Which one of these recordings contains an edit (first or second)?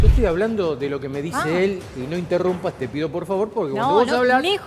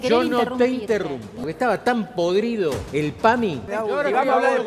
second